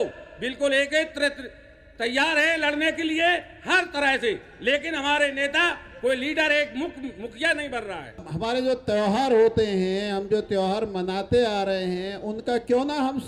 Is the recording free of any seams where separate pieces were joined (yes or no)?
no